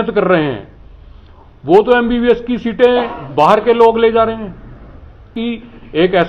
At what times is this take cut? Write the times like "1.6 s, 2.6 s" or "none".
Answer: 5.3 s